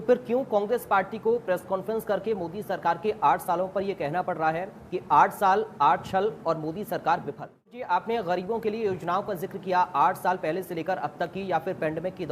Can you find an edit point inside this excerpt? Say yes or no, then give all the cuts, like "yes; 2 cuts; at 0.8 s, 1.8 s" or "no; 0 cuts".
yes; 1 cut; at 7.8 s